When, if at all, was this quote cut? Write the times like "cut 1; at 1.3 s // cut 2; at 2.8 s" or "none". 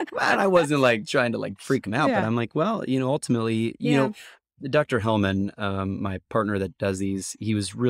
none